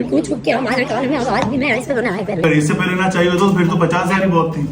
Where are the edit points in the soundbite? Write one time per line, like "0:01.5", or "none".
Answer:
0:02.4